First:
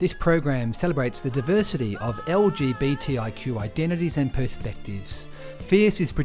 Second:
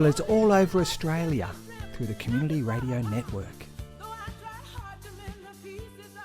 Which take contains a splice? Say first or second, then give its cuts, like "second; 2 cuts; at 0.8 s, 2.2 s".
second; 1 cut; at 3.4 s